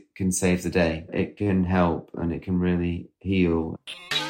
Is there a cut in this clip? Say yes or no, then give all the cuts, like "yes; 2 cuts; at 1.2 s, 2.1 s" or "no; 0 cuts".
yes; 2 cuts; at 1.2 s, 3.6 s